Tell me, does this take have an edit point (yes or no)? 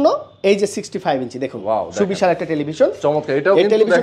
no